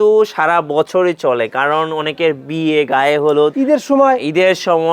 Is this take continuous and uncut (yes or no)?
no